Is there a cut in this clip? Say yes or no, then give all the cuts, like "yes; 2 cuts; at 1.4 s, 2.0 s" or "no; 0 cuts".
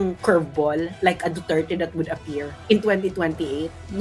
yes; 1 cut; at 2.5 s